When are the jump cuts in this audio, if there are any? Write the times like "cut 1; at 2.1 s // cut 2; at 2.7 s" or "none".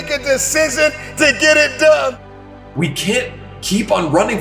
cut 1; at 2.7 s